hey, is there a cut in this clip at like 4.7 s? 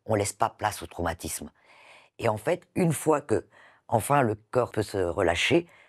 yes; 1 cut; at 4.7 s

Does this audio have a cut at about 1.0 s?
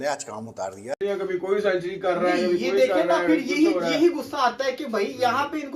yes; 1 cut; at 1.0 s

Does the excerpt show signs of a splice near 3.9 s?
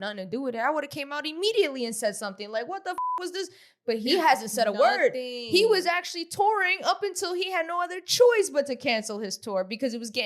no; 0 cuts

